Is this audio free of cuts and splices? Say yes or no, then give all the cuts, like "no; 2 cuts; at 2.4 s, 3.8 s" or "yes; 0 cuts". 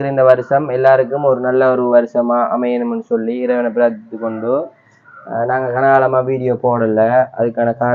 yes; 0 cuts